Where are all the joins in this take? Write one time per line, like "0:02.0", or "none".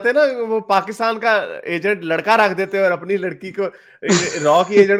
none